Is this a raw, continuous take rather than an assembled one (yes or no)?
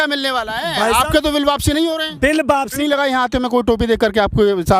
no